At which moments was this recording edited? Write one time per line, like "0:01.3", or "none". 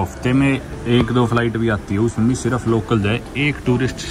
none